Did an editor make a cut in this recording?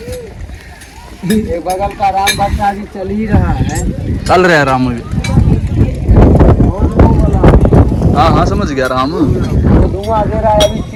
no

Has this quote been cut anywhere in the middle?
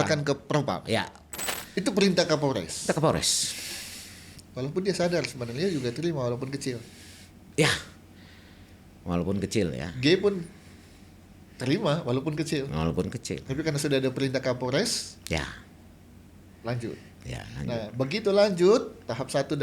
yes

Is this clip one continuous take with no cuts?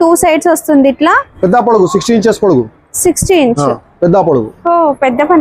yes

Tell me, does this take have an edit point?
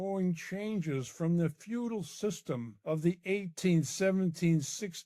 yes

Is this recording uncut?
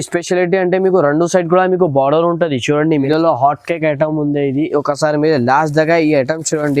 no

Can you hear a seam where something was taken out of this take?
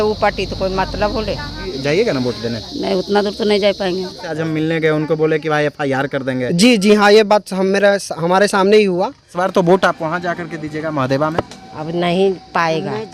yes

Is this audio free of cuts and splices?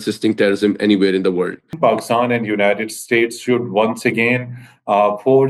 no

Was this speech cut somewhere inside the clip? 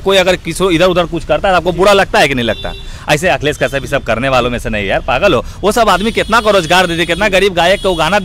no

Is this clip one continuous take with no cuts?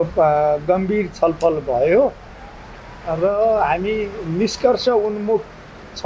yes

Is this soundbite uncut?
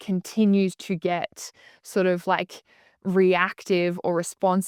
yes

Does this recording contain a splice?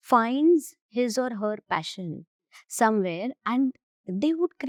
no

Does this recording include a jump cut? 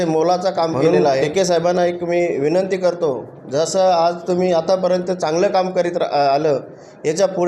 yes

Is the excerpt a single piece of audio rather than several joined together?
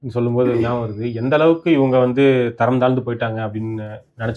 yes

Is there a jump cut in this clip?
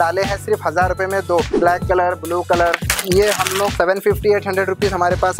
yes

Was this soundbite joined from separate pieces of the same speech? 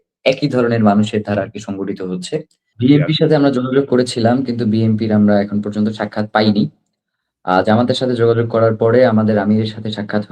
yes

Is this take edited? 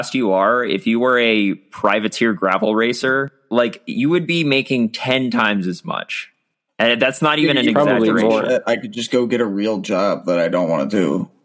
yes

